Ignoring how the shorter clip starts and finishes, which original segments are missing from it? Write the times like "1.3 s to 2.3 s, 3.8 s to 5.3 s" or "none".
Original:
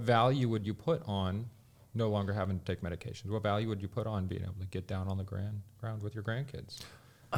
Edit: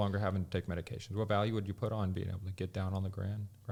none